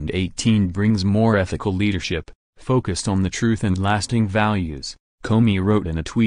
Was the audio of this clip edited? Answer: yes; 1 cut; at 3.6 s

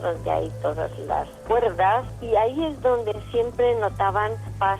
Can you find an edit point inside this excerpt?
no; 0 cuts

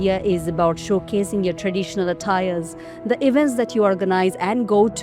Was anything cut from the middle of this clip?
no; 0 cuts

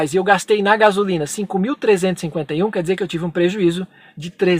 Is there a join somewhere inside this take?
no; 0 cuts

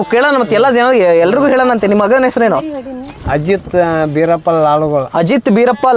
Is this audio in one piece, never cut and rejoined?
yes; 0 cuts

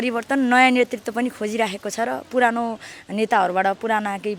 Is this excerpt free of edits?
yes; 0 cuts

